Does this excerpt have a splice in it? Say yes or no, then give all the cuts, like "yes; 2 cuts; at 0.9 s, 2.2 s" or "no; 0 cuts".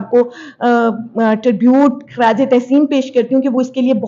no; 0 cuts